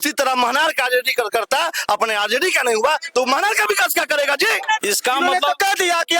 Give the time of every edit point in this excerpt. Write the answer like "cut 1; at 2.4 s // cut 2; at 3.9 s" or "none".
cut 1; at 4.8 s